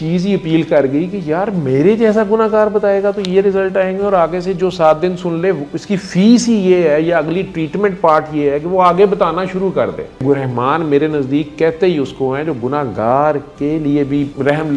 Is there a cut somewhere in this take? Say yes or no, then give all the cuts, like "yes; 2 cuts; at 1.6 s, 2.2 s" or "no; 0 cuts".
yes; 1 cut; at 10.2 s